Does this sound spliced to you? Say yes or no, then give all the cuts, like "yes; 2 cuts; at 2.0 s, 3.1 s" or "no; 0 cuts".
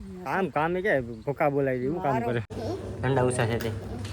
yes; 1 cut; at 2.5 s